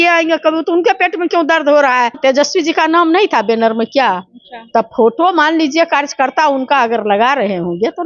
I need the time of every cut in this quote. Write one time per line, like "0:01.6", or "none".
0:02.2